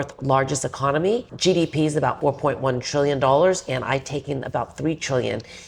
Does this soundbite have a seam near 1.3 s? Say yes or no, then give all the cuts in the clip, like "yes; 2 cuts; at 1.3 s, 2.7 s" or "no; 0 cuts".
yes; 2 cuts; at 1.3 s, 2.2 s